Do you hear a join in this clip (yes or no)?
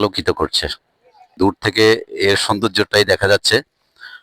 yes